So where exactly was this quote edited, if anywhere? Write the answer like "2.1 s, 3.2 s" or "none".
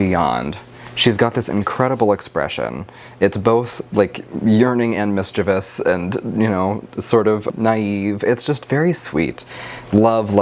none

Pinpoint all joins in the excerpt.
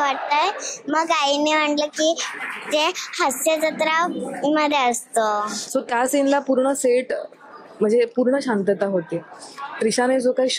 5.5 s

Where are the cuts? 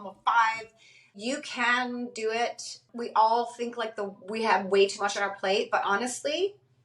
1.1 s, 2.8 s

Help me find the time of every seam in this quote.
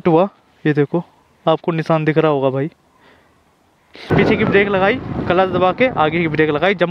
4.1 s

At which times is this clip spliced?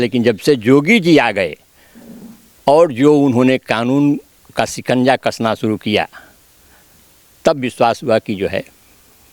none

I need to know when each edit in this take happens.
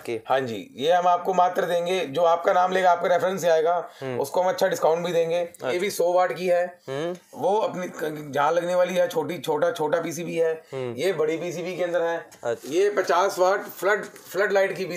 5.8 s, 12.6 s

